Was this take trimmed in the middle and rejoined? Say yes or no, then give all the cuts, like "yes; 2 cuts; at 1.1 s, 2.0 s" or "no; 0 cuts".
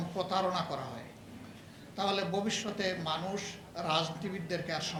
no; 0 cuts